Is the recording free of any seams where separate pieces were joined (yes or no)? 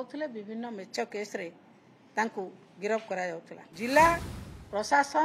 no